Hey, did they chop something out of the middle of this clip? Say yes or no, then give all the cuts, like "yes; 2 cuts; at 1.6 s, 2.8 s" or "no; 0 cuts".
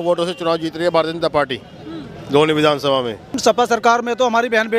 yes; 1 cut; at 3.4 s